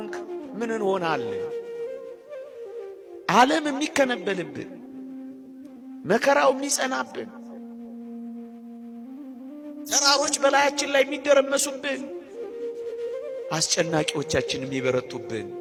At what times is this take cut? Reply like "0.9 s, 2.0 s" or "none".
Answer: none